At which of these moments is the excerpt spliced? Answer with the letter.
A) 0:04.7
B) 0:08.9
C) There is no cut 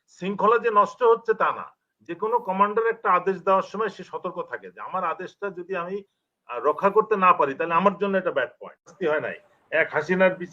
B